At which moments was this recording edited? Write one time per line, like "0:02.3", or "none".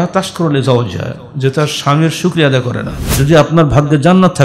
0:03.0